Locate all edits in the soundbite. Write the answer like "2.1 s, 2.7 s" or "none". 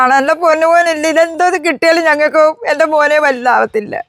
none